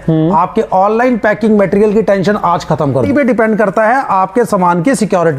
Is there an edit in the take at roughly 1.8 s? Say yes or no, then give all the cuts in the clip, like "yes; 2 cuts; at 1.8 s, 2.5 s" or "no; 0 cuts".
no; 1 cut; at 3.1 s